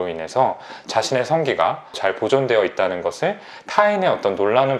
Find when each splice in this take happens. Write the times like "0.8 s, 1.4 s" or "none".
2.0 s